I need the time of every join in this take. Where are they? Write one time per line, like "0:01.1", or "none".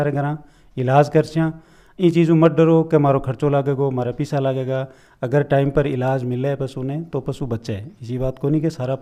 none